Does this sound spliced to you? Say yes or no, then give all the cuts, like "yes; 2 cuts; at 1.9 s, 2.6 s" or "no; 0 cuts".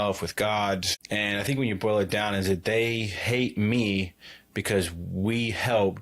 yes; 1 cut; at 1.0 s